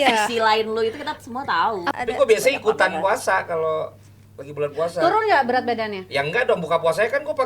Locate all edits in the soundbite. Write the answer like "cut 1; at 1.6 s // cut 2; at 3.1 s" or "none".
cut 1; at 1.9 s